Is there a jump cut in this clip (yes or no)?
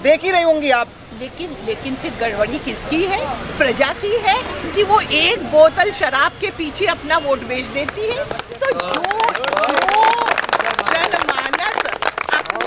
no